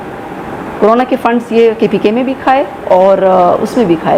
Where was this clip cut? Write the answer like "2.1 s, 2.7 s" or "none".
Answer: none

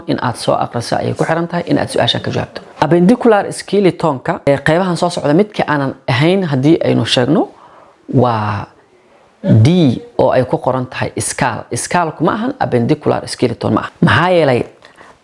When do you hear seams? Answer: 2.6 s, 4.4 s, 13.9 s

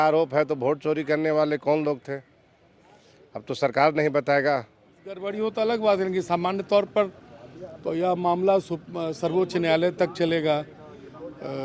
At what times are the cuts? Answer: 5.3 s

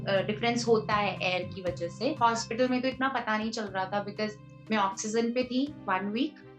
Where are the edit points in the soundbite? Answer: 2.2 s

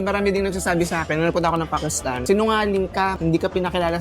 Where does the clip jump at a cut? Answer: 2.2 s, 3.2 s

